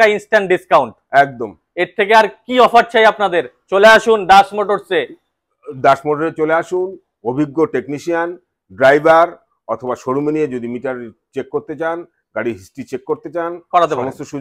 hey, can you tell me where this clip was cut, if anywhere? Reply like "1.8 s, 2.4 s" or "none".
none